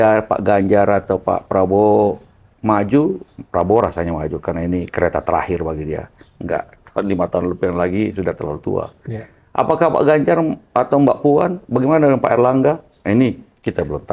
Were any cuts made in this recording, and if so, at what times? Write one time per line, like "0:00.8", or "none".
none